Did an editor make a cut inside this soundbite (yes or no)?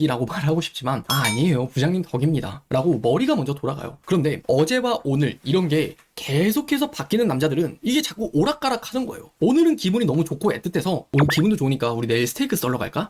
yes